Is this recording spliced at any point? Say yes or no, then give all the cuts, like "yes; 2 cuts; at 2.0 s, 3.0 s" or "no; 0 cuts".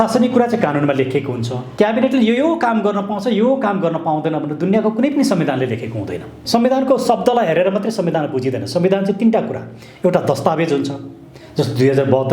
yes; 2 cuts; at 1.6 s, 6.4 s